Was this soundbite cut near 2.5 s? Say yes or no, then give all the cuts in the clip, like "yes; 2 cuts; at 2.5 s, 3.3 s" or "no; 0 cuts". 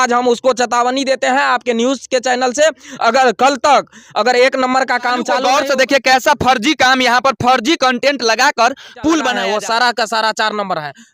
no; 2 cuts; at 5.4 s, 9.4 s